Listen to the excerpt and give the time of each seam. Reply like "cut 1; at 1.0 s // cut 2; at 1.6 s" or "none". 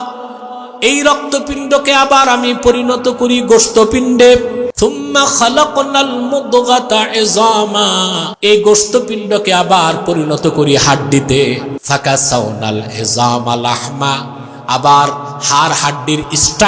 cut 1; at 4.7 s // cut 2; at 8.2 s // cut 3; at 11.7 s

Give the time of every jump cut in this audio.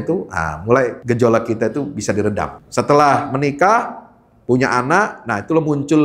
cut 1; at 1.0 s // cut 2; at 2.6 s

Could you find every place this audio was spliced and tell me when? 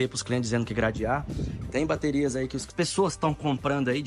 cut 1; at 2.7 s

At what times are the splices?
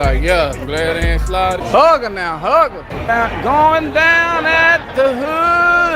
cut 1; at 1.6 s // cut 2; at 2.9 s

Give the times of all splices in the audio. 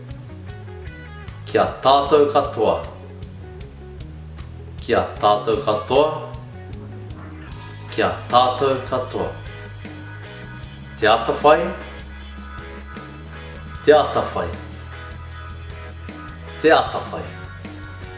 cut 1; at 2.9 s // cut 2; at 4.8 s // cut 3; at 6.4 s // cut 4; at 7.9 s // cut 5; at 9.4 s // cut 6; at 11.0 s

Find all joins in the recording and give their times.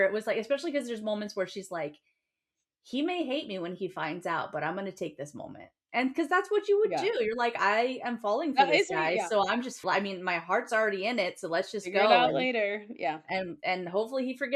cut 1; at 9.8 s

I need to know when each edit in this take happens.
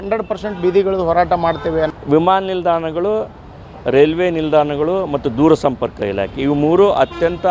cut 1; at 1.9 s

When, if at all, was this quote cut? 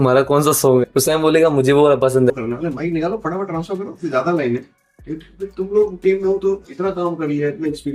cut 1; at 2.3 s

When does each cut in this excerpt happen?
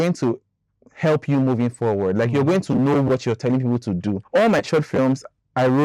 cut 1; at 4.2 s

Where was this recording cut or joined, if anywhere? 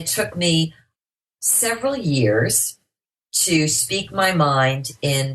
cut 1; at 1.0 s

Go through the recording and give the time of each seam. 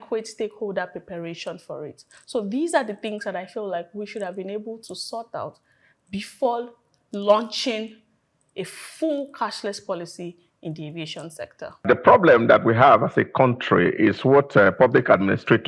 cut 1; at 11.9 s

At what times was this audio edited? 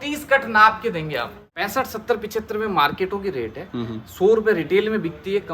cut 1; at 1.4 s

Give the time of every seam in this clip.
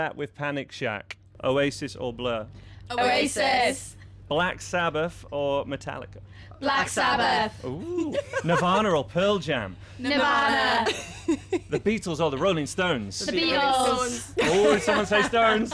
cut 1; at 1.3 s

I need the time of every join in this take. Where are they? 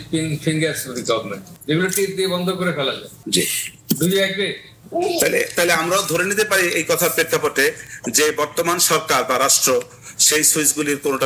cut 1; at 1.5 s

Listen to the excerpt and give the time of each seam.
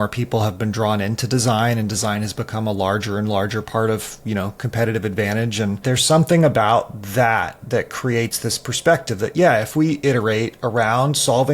cut 1; at 5.8 s

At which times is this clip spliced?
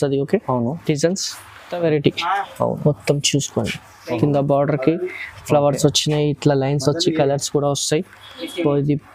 cut 1; at 1.7 s

